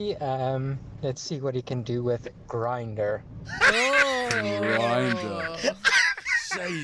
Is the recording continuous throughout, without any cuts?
yes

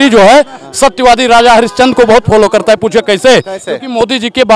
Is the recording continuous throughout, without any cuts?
yes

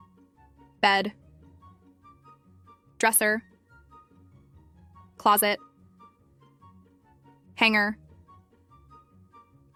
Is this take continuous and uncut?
yes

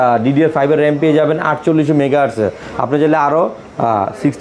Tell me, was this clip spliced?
no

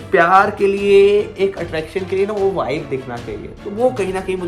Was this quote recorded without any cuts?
yes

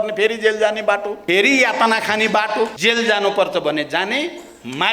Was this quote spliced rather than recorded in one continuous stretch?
yes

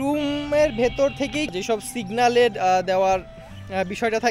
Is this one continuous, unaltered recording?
no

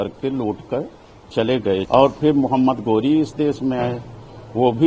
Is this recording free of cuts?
no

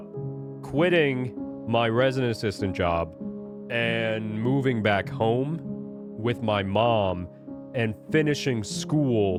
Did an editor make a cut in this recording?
no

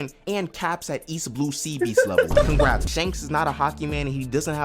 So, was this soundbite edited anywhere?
yes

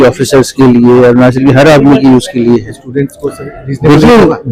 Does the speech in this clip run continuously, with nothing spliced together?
yes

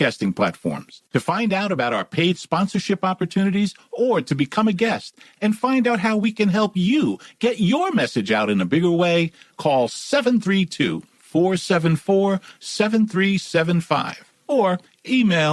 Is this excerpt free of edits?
yes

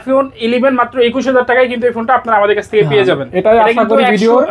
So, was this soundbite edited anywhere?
no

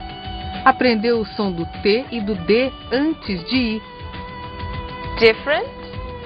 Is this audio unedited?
no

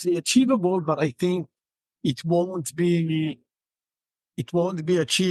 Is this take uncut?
yes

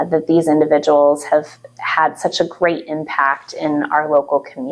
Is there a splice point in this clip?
no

